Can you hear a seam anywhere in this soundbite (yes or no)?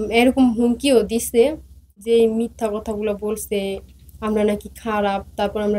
yes